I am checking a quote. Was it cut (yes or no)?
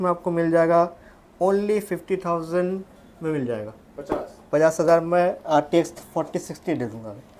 no